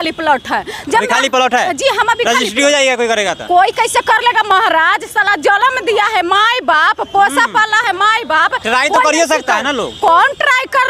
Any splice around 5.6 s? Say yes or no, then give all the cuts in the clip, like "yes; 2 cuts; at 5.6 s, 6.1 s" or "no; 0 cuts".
no; 0 cuts